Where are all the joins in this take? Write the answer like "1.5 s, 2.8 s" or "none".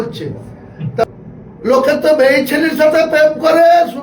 1.0 s